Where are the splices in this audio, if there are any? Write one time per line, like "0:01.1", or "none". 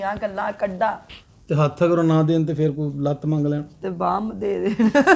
0:01.0